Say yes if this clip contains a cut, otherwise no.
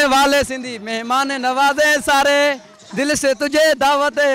no